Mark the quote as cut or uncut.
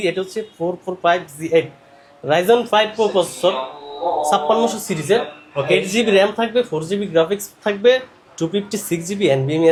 uncut